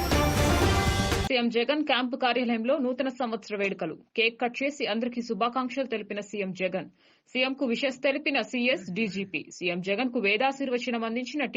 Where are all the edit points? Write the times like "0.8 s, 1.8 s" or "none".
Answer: 1.2 s